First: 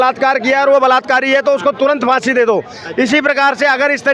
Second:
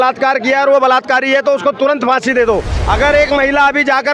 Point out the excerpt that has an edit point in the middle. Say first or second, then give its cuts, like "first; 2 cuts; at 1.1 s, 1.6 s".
second; 1 cut; at 2.7 s